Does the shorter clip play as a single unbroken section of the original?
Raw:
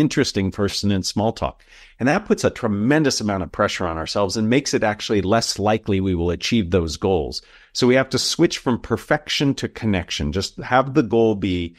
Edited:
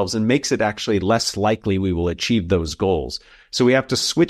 yes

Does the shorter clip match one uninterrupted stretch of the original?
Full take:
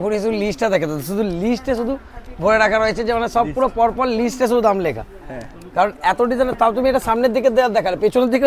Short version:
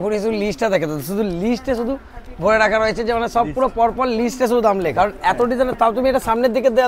no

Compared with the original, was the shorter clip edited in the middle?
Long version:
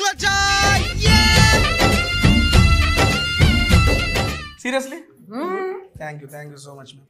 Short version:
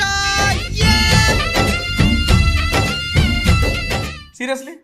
no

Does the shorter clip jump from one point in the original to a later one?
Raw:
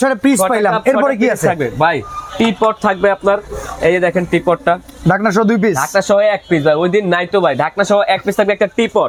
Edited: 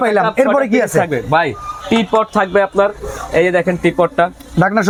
no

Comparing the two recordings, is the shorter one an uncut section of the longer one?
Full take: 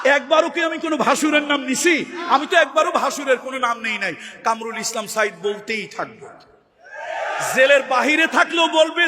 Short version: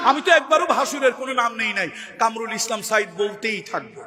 yes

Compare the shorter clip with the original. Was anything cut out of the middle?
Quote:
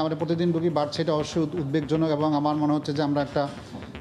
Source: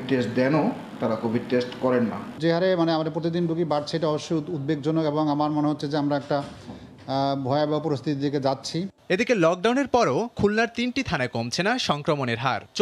no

